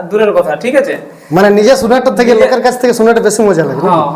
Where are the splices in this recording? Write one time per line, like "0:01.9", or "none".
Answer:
none